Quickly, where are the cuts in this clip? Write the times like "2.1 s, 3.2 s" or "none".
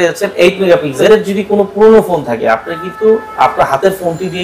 1.1 s